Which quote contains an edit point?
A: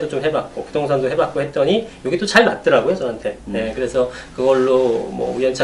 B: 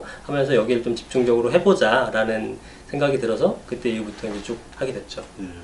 A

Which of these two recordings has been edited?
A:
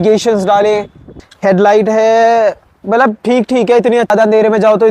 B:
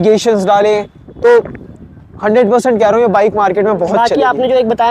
A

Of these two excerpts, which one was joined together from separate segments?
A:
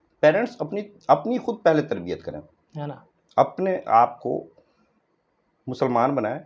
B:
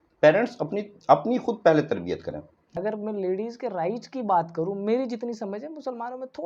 B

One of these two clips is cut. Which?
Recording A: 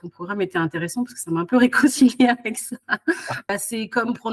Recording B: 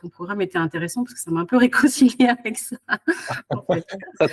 A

